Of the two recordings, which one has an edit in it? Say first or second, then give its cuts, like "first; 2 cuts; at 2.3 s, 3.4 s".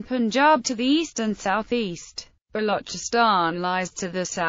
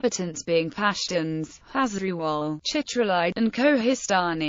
second; 1 cut; at 2.7 s